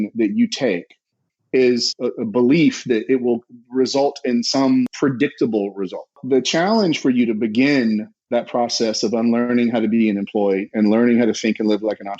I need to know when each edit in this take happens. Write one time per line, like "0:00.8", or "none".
0:01.9
0:04.9
0:06.2

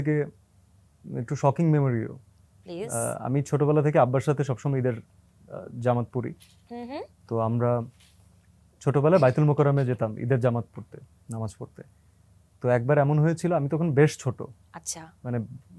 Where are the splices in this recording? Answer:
none

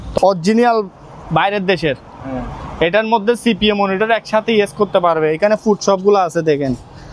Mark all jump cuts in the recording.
none

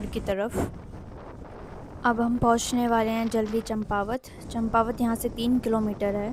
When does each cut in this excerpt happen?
none

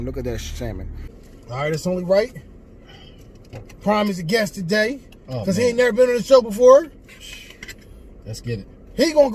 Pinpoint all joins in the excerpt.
0:01.0

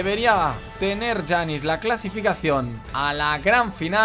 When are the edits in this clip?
0:02.8

